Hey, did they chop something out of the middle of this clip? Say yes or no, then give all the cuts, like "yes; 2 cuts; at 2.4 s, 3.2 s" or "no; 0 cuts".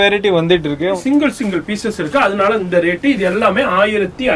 yes; 1 cut; at 1.0 s